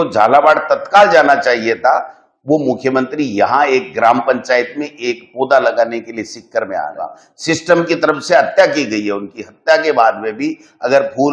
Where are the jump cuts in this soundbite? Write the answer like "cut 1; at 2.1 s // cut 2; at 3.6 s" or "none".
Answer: cut 1; at 7.3 s

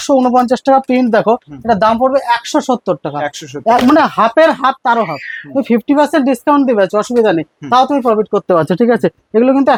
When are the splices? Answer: none

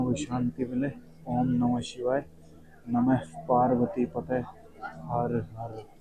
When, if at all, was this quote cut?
none

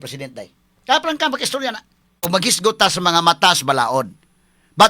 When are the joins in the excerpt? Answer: cut 1; at 2.3 s

